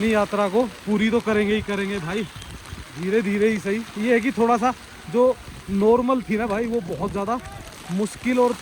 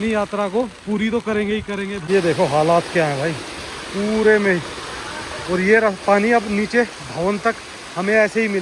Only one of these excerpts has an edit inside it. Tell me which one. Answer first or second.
second